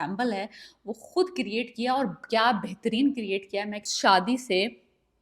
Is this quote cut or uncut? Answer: cut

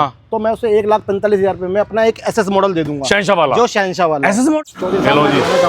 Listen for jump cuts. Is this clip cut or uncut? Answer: cut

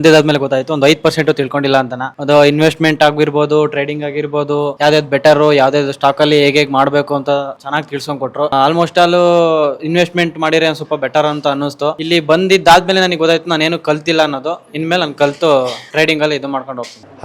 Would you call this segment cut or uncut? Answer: uncut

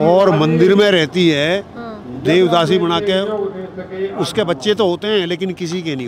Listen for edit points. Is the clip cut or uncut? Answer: uncut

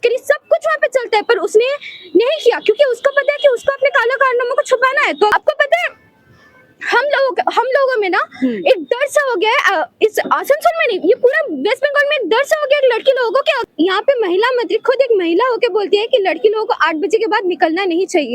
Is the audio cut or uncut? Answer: cut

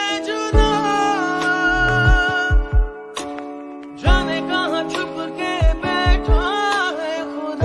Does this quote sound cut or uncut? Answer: uncut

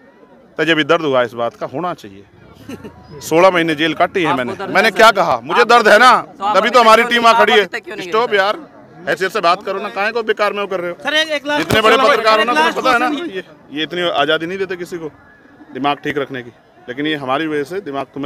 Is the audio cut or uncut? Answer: cut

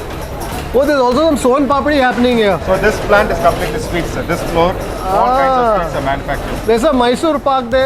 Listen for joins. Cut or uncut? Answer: uncut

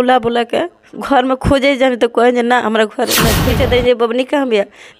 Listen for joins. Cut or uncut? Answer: cut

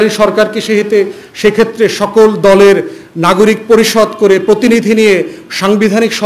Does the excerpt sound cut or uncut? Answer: uncut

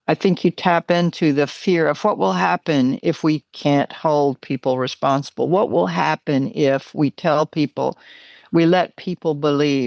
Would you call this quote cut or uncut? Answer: uncut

